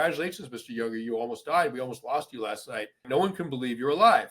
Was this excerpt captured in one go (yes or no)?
no